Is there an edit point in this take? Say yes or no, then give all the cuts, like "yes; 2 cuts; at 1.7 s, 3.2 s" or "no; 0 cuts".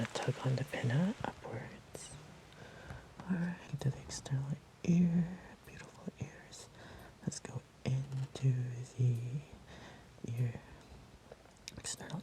yes; 1 cut; at 3.6 s